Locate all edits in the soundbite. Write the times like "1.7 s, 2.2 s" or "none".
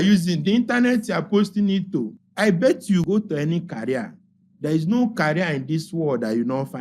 2.2 s, 3.0 s

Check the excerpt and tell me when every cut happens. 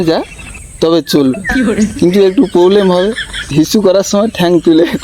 3.5 s

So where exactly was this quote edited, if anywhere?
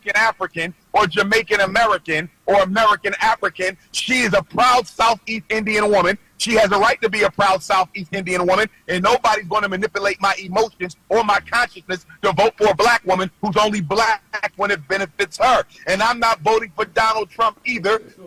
none

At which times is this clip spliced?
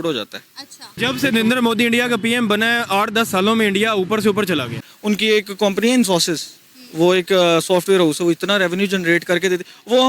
0.9 s, 4.9 s

